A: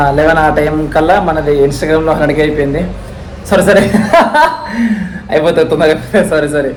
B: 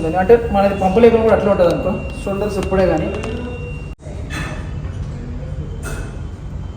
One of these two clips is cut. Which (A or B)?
B